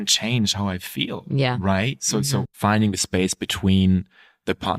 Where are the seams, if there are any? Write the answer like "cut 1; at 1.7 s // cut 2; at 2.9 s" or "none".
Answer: cut 1; at 2.5 s